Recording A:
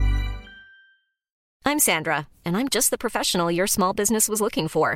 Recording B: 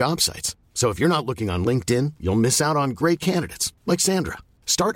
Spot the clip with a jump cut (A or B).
A